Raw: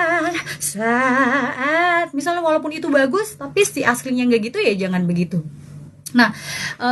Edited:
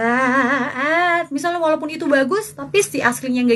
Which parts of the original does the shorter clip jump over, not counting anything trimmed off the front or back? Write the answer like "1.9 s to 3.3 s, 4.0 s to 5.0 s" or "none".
none